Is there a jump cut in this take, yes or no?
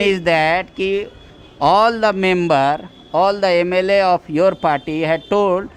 no